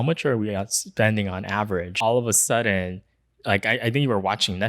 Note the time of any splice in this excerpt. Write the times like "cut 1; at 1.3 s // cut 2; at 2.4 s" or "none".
cut 1; at 1.9 s